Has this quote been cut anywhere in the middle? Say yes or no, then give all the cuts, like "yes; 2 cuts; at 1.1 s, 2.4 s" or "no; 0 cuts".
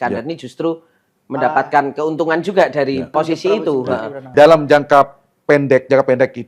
yes; 2 cuts; at 3.1 s, 4.3 s